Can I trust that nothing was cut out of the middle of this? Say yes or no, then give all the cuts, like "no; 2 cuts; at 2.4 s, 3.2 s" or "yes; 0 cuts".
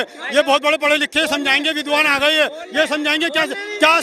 yes; 0 cuts